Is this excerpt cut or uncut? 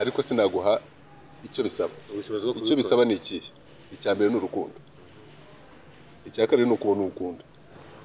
uncut